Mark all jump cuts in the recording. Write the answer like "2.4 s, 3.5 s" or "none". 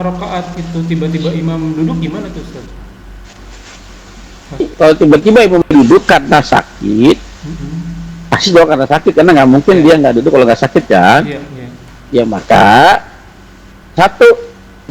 4.7 s

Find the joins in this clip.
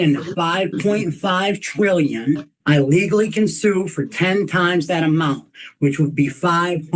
2.5 s

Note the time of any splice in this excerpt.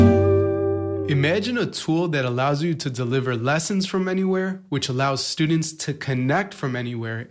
1.1 s

